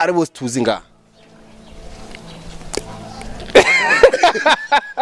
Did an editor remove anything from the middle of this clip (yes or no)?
no